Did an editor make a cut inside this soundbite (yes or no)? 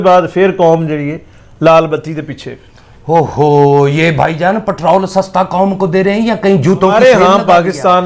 yes